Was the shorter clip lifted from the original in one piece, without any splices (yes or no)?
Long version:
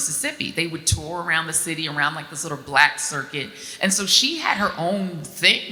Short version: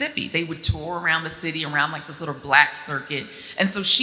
yes